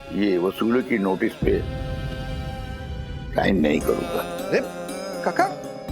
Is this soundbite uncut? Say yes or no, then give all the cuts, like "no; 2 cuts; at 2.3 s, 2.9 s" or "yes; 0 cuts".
no; 3 cuts; at 1.6 s, 3.3 s, 4.1 s